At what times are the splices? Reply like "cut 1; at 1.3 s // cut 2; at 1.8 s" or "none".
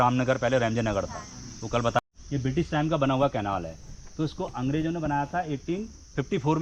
cut 1; at 2.0 s